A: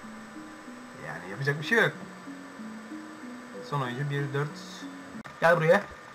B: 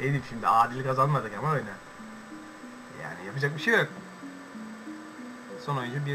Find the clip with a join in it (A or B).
A